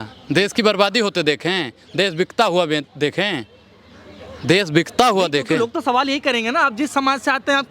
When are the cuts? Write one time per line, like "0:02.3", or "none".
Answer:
none